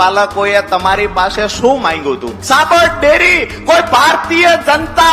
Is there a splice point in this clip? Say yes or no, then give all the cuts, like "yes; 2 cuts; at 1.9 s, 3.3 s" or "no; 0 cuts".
yes; 1 cut; at 2.3 s